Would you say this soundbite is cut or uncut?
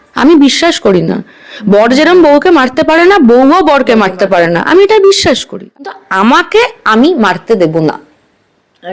cut